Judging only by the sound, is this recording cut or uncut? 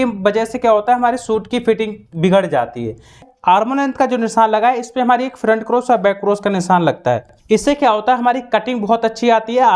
cut